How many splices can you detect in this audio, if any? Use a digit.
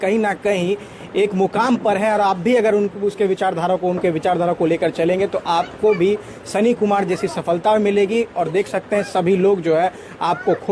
0